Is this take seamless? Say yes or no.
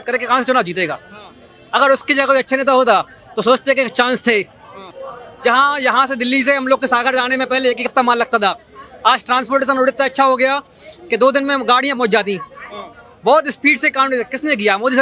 no